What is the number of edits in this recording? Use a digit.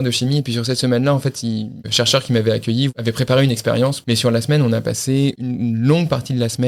4